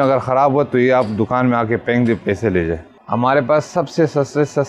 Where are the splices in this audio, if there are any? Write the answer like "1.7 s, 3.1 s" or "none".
3.0 s